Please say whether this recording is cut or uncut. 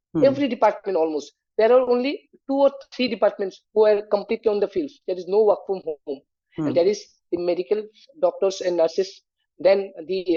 uncut